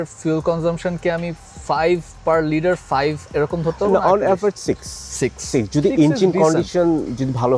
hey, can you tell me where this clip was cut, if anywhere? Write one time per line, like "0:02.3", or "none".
none